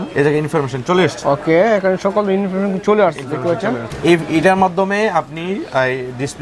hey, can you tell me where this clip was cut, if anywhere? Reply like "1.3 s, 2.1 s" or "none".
none